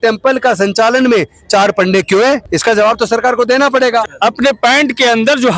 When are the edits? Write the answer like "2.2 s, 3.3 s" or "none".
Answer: 2.5 s, 4.1 s

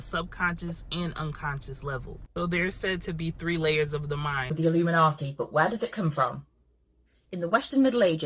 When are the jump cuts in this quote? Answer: 4.5 s

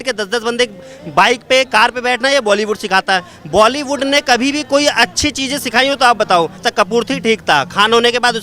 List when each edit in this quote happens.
6.6 s

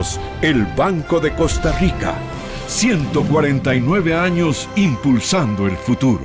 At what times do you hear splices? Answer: none

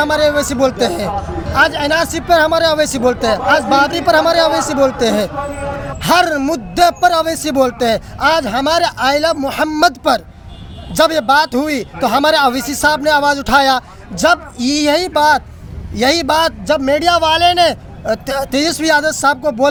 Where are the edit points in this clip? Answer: none

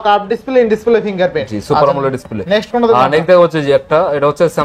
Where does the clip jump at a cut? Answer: none

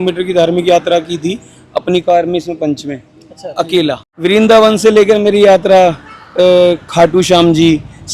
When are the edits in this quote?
4.1 s

